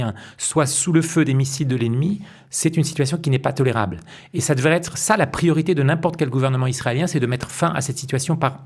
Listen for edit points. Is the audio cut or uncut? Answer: uncut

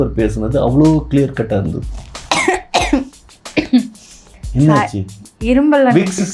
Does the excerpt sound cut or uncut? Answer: uncut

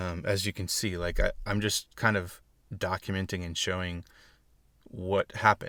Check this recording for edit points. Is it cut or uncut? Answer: uncut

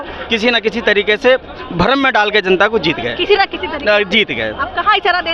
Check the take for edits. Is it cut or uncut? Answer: uncut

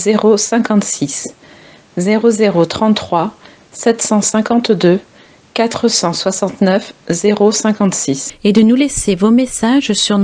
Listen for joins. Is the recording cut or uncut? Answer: cut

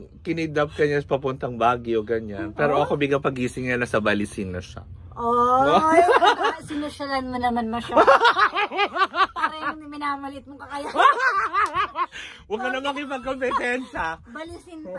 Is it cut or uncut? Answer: uncut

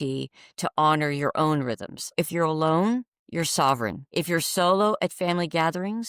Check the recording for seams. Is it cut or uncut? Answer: cut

